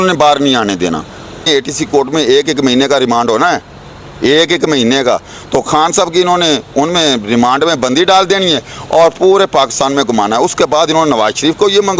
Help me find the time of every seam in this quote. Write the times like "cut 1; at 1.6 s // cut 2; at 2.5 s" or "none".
cut 1; at 1.5 s

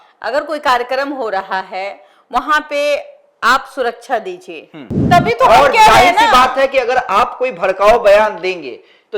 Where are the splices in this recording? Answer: cut 1; at 5.0 s

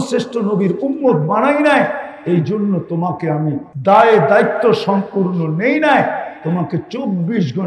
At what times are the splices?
cut 1; at 3.7 s

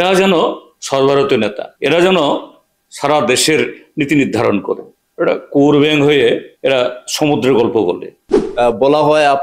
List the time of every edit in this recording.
cut 1; at 1.7 s // cut 2; at 5.0 s // cut 3; at 6.5 s // cut 4; at 8.4 s

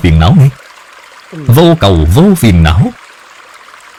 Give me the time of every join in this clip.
none

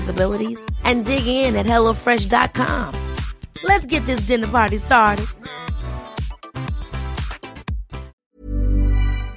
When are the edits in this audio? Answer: cut 1; at 8.2 s

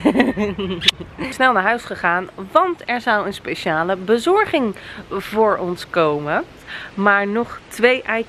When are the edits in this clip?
cut 1; at 1.3 s // cut 2; at 6.7 s

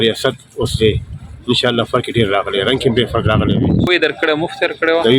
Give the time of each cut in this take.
cut 1; at 3.9 s

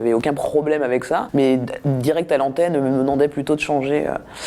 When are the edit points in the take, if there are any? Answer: cut 1; at 1.3 s

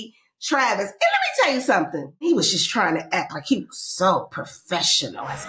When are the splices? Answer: cut 1; at 2.3 s

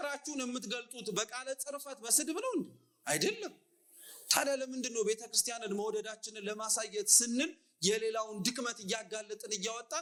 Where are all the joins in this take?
none

